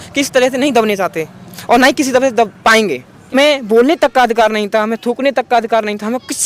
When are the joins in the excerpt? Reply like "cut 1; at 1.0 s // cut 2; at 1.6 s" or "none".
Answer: cut 1; at 3.3 s